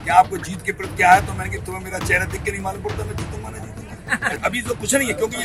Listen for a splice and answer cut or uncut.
cut